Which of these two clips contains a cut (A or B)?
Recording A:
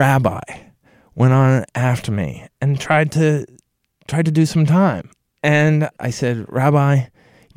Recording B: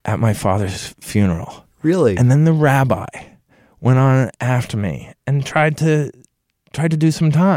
A